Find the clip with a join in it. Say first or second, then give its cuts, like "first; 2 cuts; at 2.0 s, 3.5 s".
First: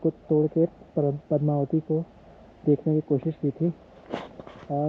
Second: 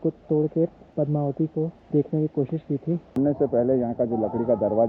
second; 3 cuts; at 0.9 s, 1.8 s, 3.2 s